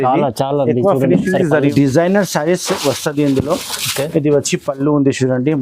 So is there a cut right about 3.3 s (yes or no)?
no